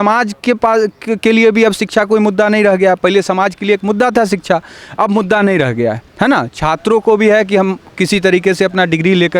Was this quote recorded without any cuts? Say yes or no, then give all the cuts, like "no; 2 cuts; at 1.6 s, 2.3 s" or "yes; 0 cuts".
yes; 0 cuts